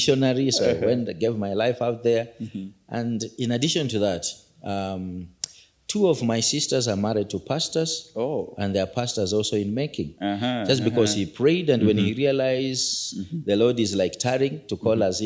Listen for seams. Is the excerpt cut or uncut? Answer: uncut